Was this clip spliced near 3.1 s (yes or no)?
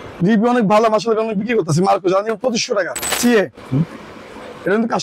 yes